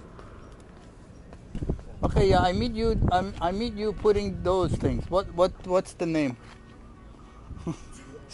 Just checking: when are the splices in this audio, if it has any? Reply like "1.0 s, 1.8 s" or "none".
1.5 s